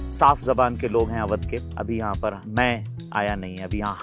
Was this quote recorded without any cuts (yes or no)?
no